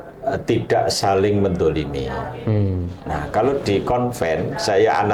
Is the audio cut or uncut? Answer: uncut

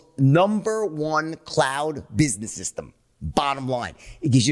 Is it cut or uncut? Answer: uncut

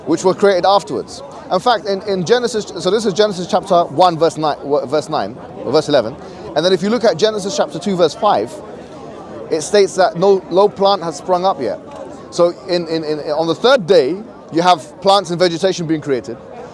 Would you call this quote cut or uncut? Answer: uncut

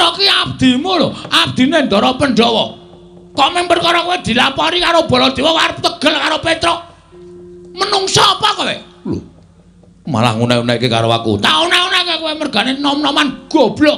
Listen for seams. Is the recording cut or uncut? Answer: uncut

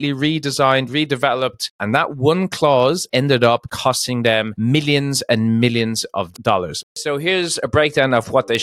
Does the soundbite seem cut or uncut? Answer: cut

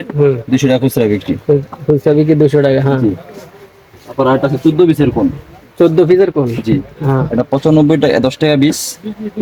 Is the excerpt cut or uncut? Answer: uncut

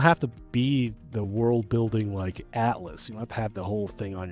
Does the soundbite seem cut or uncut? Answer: uncut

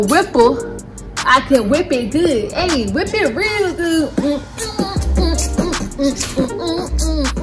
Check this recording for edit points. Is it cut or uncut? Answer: uncut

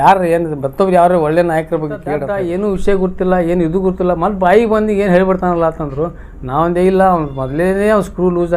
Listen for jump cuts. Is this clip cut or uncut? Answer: cut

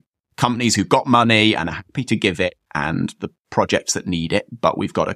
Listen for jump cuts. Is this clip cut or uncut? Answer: uncut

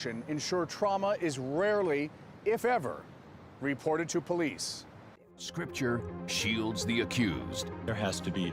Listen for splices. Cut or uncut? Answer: cut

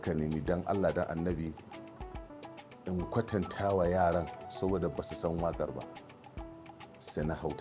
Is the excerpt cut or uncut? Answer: uncut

